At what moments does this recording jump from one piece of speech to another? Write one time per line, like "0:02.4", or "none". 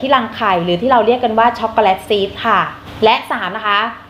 0:02.8